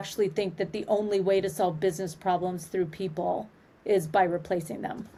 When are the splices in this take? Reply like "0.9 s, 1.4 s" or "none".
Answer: none

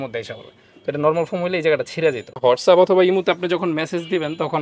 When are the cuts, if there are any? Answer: 2.3 s

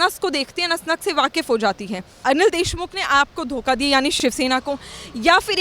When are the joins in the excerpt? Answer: 2.2 s

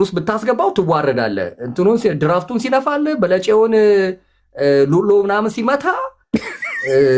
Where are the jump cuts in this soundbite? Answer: none

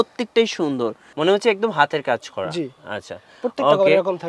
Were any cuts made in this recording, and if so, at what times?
1.0 s

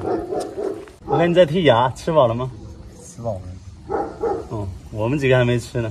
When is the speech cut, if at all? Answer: 0.9 s

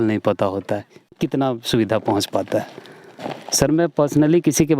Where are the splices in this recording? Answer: 1.1 s

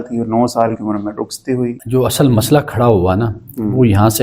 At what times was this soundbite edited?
1.8 s

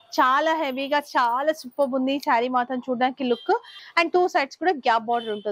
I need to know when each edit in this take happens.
3.8 s

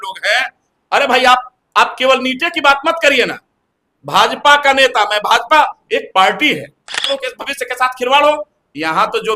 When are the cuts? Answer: 7.1 s

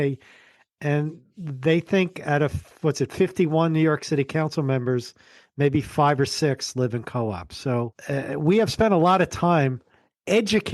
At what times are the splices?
8.0 s

